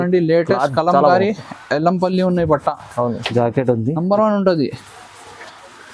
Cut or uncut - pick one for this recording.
cut